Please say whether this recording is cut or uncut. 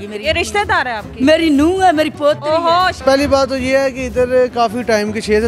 cut